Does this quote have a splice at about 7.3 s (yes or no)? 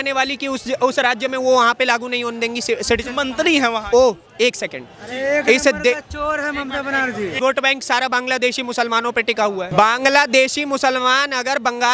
yes